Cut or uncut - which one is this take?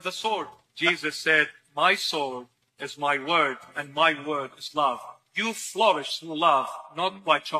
cut